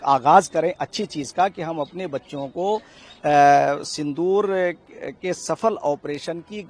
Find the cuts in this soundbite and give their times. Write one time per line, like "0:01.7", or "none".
none